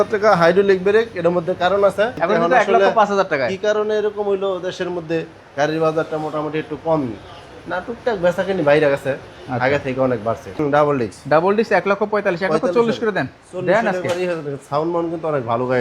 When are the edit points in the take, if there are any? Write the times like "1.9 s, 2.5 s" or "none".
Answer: 2.1 s, 10.5 s